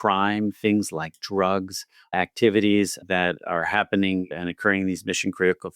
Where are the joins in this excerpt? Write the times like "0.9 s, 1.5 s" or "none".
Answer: none